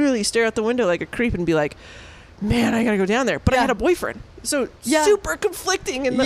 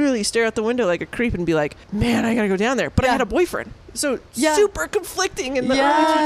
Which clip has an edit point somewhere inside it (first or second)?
second